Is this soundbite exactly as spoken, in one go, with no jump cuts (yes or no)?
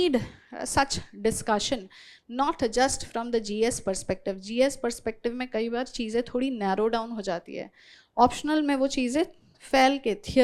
yes